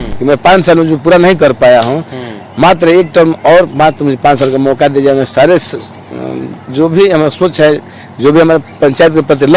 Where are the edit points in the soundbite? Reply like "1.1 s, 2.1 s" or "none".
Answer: none